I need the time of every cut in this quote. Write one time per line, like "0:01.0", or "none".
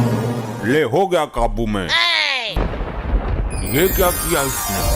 0:02.6